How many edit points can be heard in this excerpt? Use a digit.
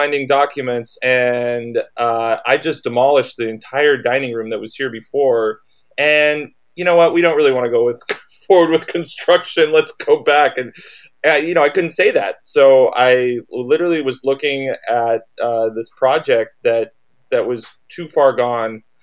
0